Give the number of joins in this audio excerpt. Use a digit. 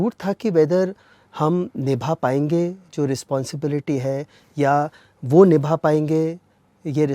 0